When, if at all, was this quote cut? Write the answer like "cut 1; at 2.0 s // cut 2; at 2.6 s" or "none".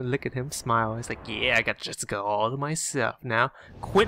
none